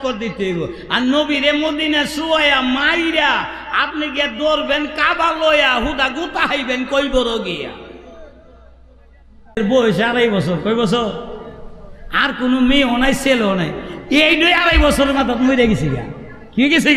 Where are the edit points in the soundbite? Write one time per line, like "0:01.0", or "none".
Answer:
0:09.6